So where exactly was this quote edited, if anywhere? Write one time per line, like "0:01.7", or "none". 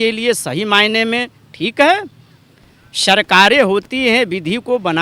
none

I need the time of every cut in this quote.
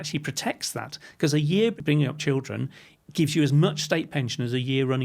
0:01.7

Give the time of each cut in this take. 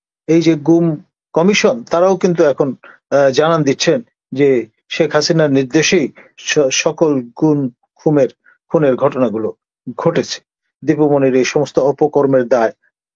0:10.7

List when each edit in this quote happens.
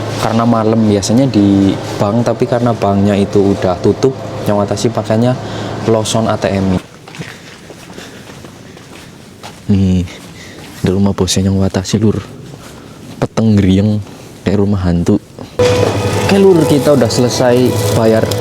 0:06.8
0:15.6

